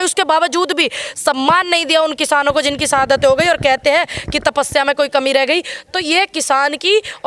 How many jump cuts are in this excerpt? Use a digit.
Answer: 0